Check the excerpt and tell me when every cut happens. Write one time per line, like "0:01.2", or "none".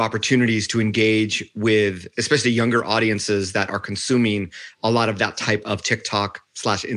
none